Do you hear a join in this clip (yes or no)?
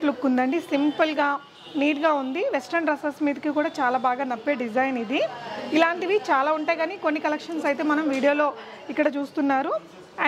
no